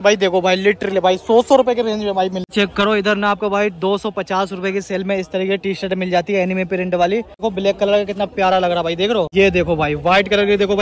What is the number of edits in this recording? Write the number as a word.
three